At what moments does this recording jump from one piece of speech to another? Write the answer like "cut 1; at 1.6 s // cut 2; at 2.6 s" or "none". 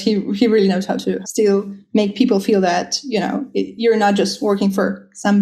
cut 1; at 1.2 s